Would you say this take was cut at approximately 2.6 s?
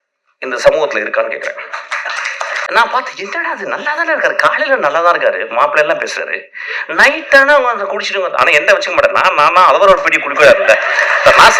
yes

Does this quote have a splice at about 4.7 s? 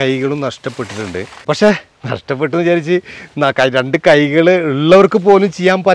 no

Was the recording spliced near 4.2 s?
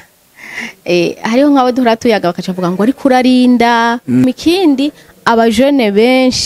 yes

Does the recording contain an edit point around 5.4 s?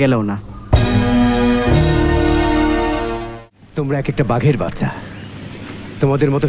no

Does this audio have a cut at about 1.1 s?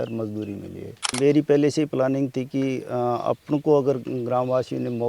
yes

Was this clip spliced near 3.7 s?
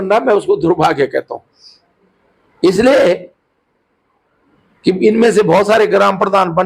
no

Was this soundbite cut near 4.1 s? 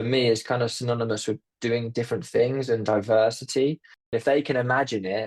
yes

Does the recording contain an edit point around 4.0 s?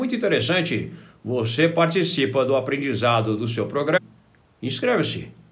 yes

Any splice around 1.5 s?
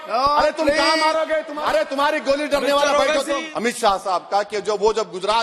yes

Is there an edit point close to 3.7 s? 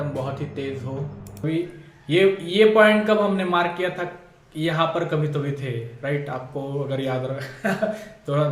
no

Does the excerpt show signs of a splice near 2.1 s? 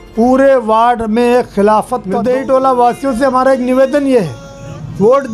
yes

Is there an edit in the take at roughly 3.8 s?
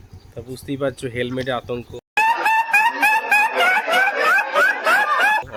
no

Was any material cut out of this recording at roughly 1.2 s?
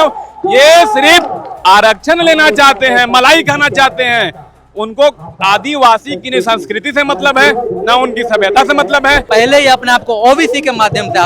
no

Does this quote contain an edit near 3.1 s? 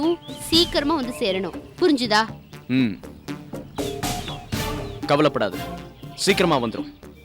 no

